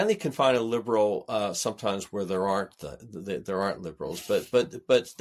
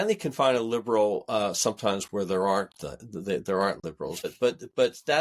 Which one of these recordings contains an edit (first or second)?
second